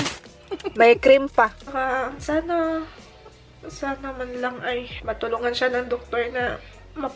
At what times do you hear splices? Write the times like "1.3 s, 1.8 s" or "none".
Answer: 1.7 s, 4.9 s